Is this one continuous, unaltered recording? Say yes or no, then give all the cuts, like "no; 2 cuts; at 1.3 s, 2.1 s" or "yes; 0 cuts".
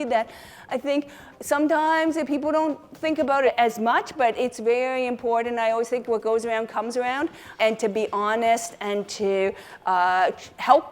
no; 2 cuts; at 3.5 s, 7.5 s